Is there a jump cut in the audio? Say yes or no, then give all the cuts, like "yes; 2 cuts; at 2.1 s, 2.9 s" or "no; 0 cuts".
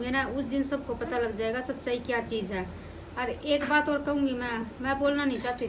no; 0 cuts